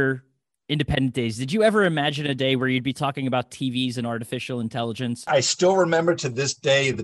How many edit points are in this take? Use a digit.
1